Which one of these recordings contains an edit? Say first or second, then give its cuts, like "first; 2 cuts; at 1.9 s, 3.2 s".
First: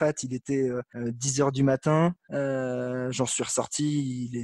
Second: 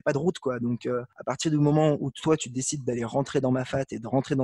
first; 1 cut; at 2.2 s